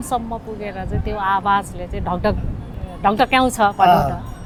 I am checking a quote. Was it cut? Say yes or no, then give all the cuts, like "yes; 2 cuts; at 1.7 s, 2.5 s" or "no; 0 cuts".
no; 0 cuts